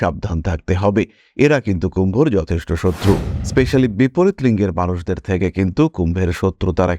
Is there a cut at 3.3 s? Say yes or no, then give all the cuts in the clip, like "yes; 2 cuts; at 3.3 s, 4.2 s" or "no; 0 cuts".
yes; 1 cut; at 3.3 s